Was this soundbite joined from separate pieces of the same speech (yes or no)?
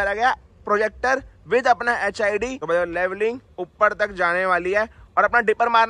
yes